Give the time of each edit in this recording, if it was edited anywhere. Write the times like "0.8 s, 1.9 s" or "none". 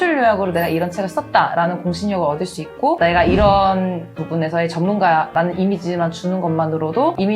3.0 s